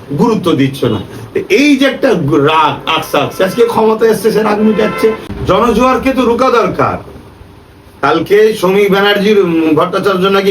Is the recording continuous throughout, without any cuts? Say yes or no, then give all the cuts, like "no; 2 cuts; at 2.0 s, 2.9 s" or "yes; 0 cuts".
no; 1 cut; at 5.3 s